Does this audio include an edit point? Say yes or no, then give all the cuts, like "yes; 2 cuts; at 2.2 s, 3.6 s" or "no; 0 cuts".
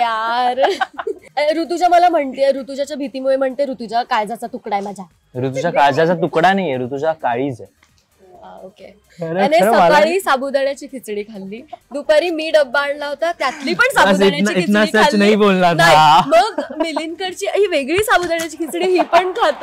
yes; 2 cuts; at 1.2 s, 9.1 s